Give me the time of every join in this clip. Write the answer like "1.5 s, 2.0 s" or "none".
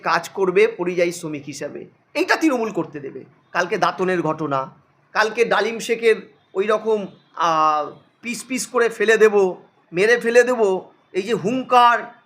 3.4 s